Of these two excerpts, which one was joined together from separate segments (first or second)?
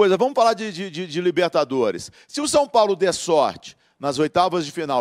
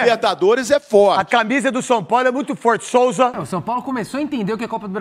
second